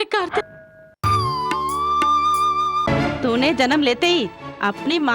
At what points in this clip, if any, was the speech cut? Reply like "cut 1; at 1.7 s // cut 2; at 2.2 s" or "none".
cut 1; at 2.9 s